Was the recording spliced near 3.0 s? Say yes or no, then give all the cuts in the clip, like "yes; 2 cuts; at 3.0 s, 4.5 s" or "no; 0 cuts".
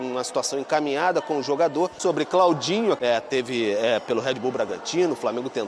yes; 2 cuts; at 2.0 s, 3.0 s